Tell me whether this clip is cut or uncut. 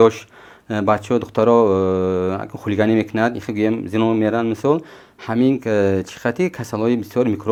uncut